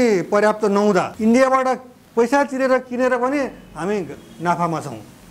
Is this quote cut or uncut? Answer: cut